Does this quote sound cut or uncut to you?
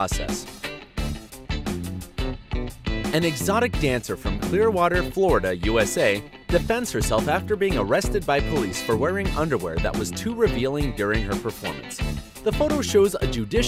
uncut